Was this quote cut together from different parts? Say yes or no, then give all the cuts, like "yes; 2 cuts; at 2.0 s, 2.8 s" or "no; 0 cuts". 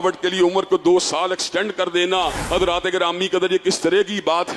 yes; 1 cut; at 2.4 s